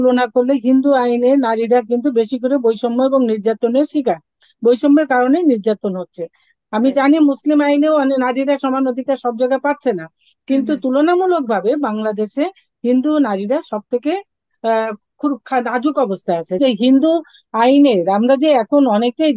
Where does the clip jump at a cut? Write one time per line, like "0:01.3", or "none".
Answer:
0:06.5
0:16.6